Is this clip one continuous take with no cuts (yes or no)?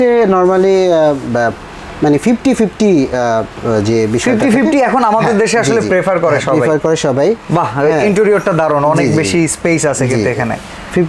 yes